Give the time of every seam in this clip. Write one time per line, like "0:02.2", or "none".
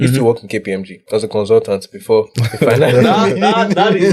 0:00.9
0:02.4